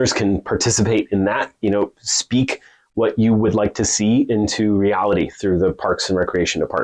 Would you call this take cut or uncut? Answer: uncut